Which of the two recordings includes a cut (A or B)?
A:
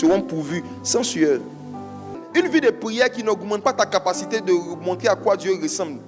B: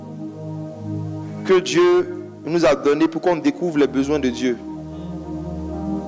A